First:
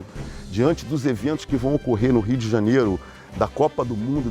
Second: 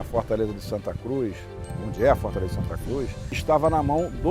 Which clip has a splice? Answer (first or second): second